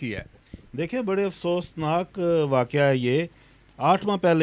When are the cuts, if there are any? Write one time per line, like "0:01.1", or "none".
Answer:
none